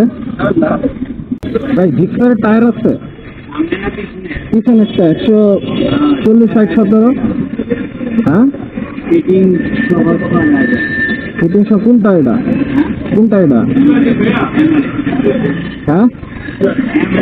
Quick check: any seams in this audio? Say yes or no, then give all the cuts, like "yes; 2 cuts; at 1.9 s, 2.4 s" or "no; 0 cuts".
yes; 1 cut; at 1.3 s